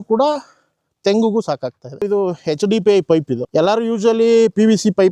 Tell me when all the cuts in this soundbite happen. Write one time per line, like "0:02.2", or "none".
0:02.1